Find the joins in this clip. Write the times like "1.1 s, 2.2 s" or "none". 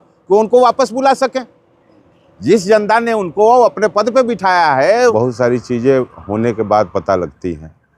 5.1 s